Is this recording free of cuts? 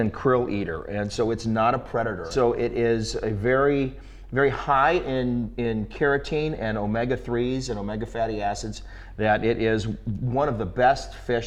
yes; 0 cuts

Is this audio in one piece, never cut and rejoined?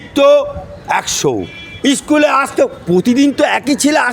yes; 0 cuts

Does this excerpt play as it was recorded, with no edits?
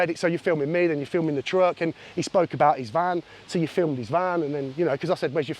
yes; 0 cuts

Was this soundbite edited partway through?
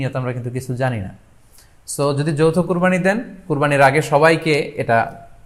no; 0 cuts

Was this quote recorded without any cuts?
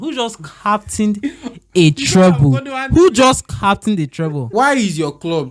no; 1 cut; at 4.4 s

